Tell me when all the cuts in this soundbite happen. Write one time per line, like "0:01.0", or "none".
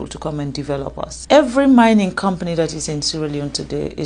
0:01.2